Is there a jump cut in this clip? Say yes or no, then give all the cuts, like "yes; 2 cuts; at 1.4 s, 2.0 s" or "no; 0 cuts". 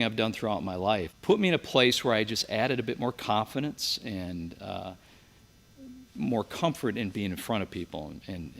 yes; 1 cut; at 1.1 s